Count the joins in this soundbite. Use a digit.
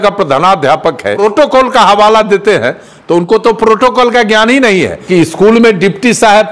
2